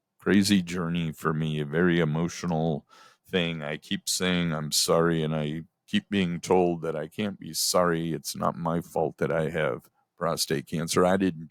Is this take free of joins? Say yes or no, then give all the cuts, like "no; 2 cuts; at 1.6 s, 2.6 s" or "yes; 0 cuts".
yes; 0 cuts